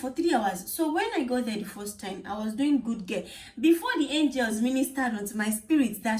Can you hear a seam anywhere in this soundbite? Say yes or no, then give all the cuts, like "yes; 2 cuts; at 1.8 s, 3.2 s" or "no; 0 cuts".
no; 0 cuts